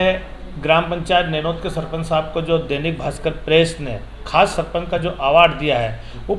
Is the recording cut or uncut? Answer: uncut